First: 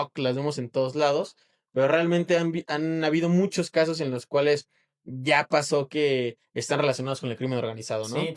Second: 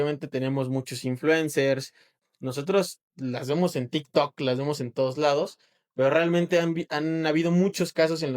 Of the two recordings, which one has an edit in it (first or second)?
second